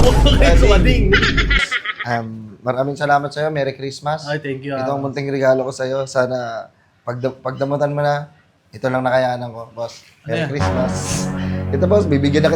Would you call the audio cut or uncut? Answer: cut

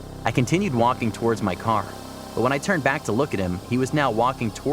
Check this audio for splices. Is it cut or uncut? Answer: uncut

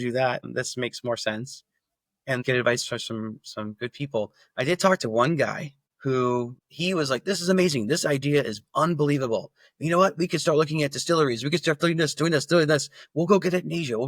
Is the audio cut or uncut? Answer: cut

